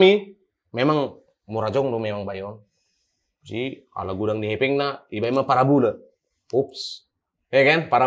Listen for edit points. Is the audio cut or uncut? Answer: uncut